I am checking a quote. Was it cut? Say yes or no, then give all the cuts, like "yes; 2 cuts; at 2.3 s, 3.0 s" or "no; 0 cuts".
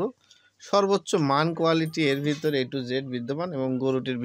no; 0 cuts